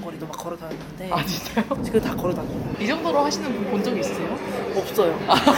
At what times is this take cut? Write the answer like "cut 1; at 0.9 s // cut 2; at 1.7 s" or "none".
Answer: cut 1; at 1.8 s